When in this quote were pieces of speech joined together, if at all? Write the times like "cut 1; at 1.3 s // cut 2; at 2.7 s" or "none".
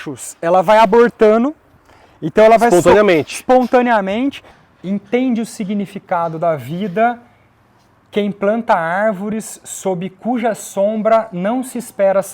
cut 1; at 4.5 s